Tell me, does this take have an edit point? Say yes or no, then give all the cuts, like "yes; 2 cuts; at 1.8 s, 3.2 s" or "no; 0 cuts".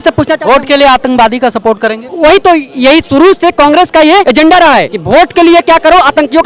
no; 0 cuts